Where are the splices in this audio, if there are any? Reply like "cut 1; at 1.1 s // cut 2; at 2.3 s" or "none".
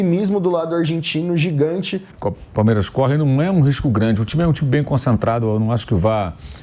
cut 1; at 2.0 s